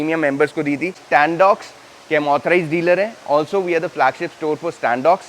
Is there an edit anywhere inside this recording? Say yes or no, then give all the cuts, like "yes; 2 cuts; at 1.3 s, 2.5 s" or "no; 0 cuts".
yes; 1 cut; at 1.0 s